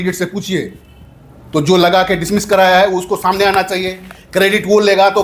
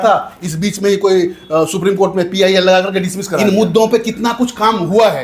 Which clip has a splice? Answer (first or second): second